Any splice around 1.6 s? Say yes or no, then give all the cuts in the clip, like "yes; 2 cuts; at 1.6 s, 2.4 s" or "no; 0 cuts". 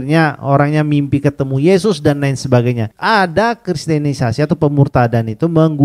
no; 1 cut; at 2.9 s